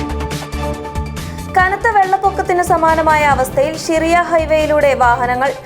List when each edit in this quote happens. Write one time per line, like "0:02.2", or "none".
0:01.0